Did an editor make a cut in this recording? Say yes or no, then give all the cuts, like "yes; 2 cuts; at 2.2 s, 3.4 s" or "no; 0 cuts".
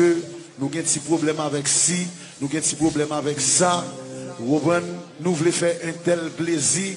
yes; 1 cut; at 5.6 s